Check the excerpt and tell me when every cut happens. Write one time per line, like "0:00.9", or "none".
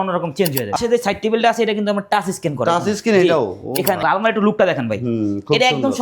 0:00.8
0:04.0

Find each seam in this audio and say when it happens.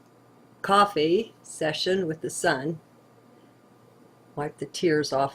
0:01.4

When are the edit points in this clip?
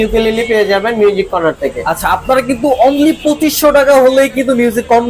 none

